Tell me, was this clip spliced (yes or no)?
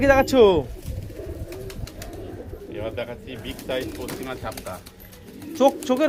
no